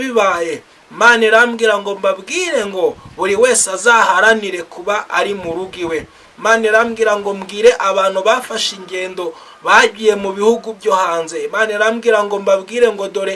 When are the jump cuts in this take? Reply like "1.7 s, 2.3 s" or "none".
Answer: none